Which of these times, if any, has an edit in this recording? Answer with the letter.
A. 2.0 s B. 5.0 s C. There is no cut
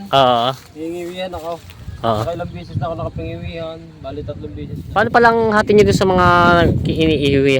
B